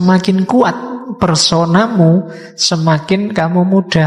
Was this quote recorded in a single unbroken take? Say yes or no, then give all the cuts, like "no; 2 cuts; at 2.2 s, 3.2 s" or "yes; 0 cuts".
yes; 0 cuts